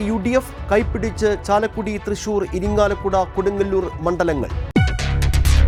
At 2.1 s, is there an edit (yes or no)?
no